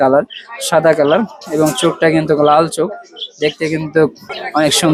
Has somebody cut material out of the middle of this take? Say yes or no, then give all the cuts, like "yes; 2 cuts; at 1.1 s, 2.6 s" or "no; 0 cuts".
no; 0 cuts